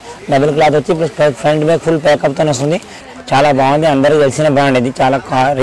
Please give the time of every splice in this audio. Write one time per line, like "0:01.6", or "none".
0:03.0